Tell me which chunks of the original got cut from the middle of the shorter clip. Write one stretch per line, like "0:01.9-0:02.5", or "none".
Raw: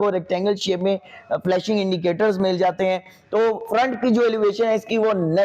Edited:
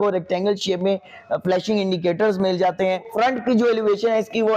0:03.1-0:03.6